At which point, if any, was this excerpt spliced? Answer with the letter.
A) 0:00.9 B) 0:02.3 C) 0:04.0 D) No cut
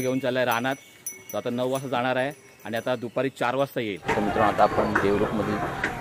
C